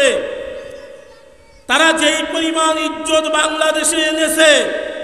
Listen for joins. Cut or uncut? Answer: uncut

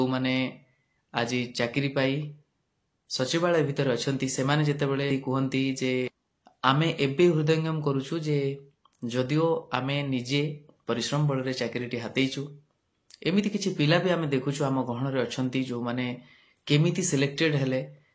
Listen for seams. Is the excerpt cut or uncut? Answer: cut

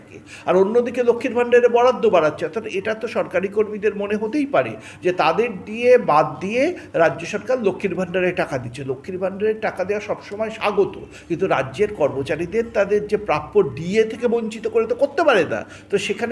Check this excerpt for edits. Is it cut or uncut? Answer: uncut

